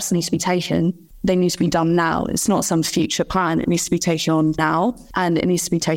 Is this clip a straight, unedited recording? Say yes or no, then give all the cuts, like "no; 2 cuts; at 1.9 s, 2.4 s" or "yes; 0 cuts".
no; 1 cut; at 1.0 s